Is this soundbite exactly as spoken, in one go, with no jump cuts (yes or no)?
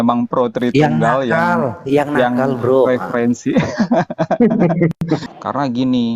no